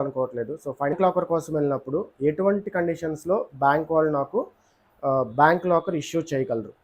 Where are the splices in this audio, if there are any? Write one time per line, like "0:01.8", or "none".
0:00.9

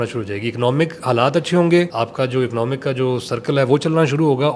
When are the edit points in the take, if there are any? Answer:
0:01.9

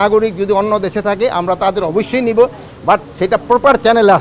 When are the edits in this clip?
none

